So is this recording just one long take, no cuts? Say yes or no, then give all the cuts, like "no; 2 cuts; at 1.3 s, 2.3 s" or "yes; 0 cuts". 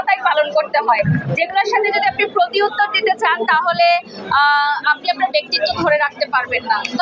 yes; 0 cuts